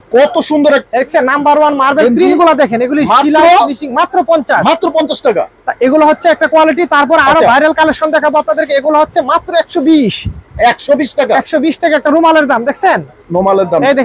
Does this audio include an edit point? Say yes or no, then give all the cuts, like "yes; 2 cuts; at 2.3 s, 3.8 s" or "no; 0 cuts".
no; 0 cuts